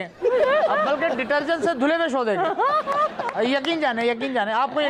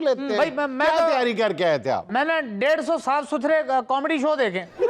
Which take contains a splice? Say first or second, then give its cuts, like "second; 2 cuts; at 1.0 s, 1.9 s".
second; 1 cut; at 2.0 s